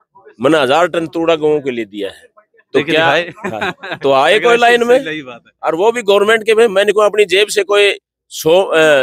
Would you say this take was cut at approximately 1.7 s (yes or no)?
no